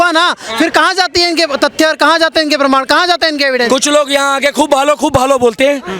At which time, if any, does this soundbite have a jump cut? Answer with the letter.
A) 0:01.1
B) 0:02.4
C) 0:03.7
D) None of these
C